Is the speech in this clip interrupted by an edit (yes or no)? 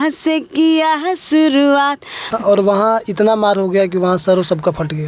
yes